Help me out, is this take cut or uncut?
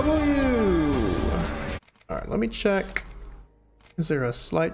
cut